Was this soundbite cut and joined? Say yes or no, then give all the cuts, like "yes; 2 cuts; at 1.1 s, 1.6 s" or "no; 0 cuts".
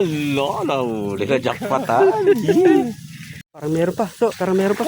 yes; 1 cut; at 3.6 s